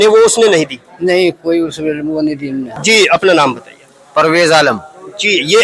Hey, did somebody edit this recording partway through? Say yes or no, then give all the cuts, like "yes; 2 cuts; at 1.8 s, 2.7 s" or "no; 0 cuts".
yes; 1 cut; at 2.8 s